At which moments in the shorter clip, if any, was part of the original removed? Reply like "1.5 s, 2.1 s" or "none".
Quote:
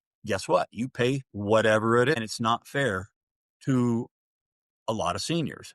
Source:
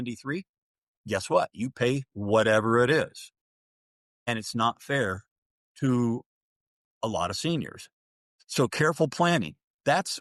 2.1 s